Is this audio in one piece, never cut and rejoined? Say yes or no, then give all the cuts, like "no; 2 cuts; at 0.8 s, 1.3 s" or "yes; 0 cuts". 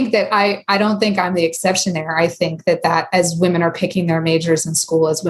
yes; 0 cuts